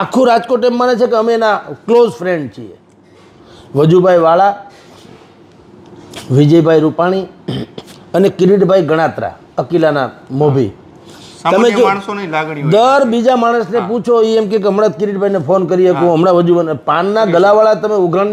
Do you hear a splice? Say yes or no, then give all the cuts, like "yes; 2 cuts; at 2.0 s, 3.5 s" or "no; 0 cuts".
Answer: no; 0 cuts